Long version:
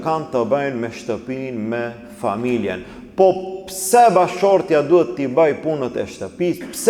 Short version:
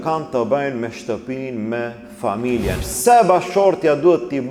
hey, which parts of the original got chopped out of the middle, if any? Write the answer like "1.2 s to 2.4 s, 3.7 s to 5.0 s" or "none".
2.9 s to 3.7 s